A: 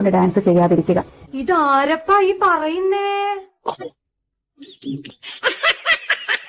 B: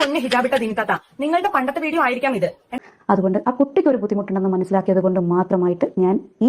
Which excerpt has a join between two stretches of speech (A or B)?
B